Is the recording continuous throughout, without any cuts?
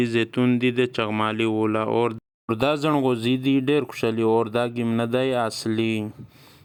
yes; 0 cuts

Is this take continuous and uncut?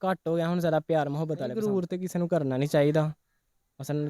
no; 1 cut; at 1.5 s

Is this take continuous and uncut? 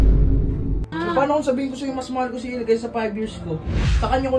no; 1 cut; at 0.9 s

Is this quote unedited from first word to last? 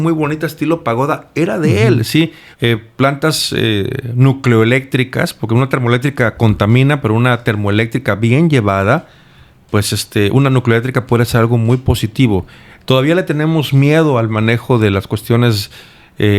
no; 1 cut; at 2.4 s

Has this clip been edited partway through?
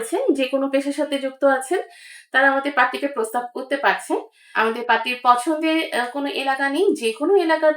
yes; 1 cut; at 4.4 s

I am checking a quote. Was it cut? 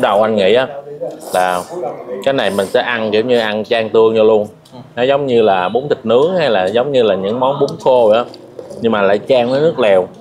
no; 0 cuts

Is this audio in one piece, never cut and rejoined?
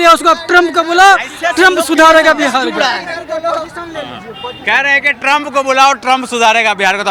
yes; 0 cuts

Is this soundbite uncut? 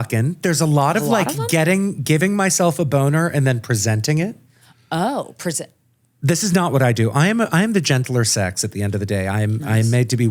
yes; 0 cuts

